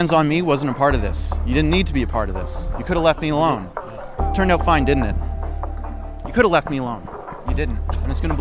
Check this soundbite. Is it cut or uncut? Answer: uncut